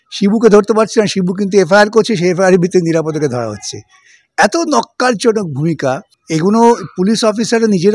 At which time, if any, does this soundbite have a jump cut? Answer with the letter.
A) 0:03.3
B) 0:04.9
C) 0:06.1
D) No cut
C